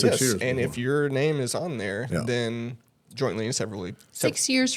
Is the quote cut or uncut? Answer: uncut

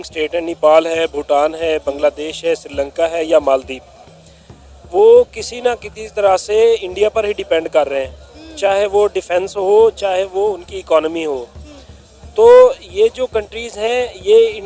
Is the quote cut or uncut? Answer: uncut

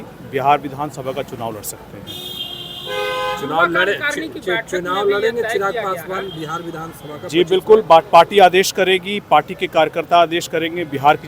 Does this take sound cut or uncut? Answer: uncut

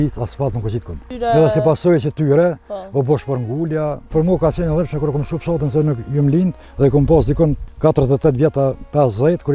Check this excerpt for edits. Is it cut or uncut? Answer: cut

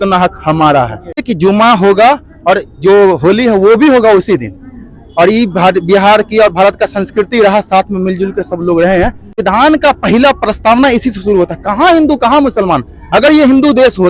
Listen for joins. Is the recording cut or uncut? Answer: cut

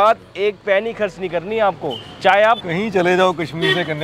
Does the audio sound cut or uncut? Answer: cut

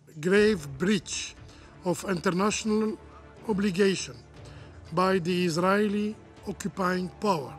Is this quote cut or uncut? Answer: uncut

